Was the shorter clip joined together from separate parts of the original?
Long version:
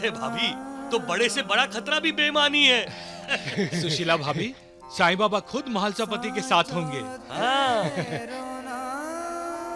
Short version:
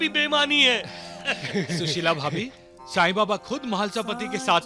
no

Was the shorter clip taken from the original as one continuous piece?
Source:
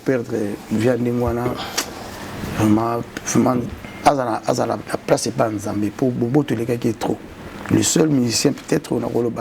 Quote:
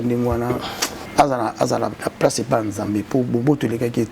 no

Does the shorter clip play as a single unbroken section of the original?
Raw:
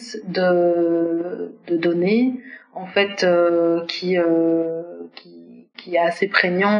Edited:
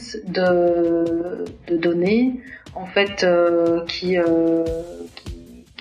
yes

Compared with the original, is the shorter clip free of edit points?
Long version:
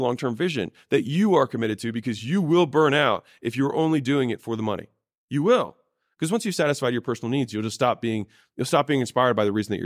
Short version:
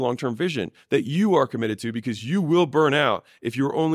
yes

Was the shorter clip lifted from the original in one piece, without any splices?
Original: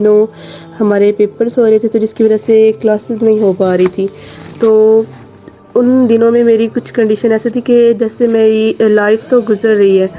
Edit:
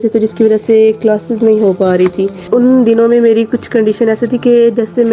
no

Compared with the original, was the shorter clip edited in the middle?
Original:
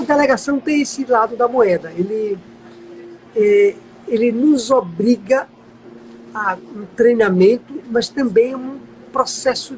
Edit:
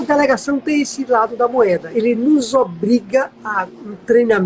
yes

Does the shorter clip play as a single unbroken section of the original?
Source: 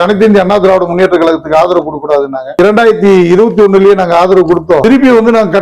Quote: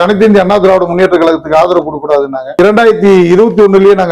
yes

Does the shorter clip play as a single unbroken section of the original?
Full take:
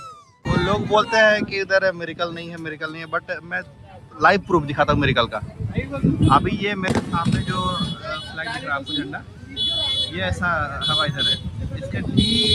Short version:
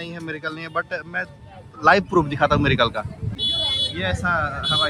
no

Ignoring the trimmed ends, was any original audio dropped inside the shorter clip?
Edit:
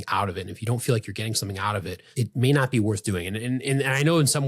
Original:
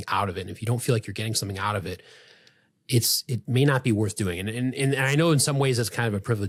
yes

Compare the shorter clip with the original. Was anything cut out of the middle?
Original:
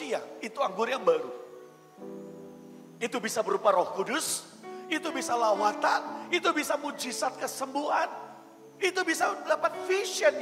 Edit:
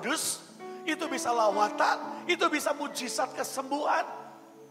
no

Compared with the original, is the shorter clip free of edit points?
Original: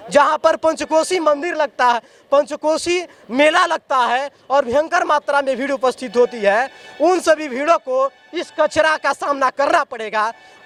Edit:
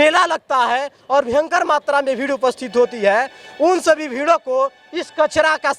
yes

